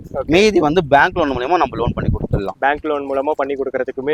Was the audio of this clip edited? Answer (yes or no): no